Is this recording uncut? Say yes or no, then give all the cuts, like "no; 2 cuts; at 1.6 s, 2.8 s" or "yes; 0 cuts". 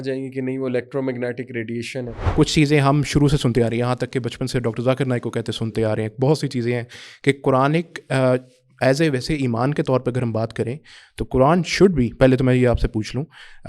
no; 1 cut; at 2.1 s